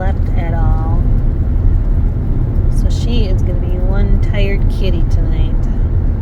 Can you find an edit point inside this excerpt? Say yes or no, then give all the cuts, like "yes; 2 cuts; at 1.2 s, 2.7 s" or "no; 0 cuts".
no; 0 cuts